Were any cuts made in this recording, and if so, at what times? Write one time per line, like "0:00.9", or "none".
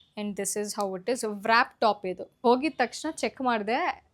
0:02.4